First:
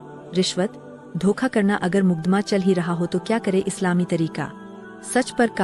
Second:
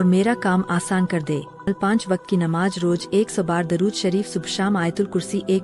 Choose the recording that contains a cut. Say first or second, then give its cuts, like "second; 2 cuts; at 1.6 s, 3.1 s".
second; 1 cut; at 1.7 s